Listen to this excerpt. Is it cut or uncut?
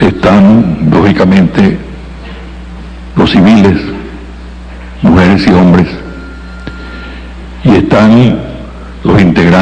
uncut